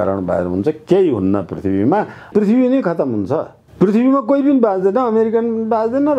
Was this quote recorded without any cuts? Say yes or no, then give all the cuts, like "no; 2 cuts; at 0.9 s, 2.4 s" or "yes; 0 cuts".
no; 2 cuts; at 2.2 s, 3.6 s